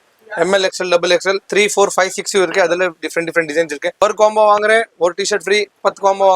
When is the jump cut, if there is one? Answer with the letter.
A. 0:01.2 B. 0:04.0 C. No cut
B